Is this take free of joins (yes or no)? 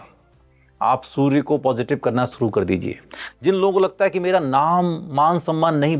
yes